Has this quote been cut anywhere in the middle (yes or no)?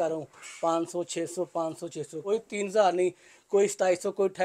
yes